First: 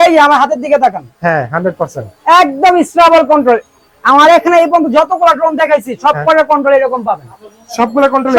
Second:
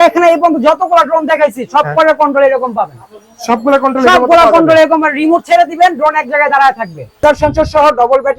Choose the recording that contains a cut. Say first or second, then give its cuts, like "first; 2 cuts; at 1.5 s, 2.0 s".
second; 1 cut; at 7.2 s